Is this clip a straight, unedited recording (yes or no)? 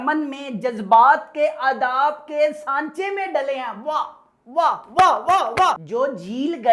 yes